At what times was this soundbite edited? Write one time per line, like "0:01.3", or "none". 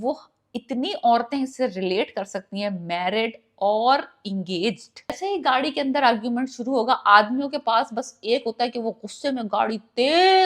0:05.2